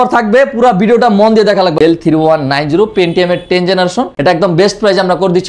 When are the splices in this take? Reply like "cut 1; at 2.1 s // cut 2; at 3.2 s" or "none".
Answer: cut 1; at 1.8 s // cut 2; at 4.2 s